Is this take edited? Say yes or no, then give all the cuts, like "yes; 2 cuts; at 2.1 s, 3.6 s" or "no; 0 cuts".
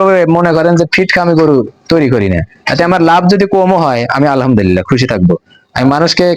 no; 0 cuts